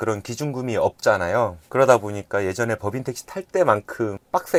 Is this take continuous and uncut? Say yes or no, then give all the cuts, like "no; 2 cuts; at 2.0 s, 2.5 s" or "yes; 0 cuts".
yes; 0 cuts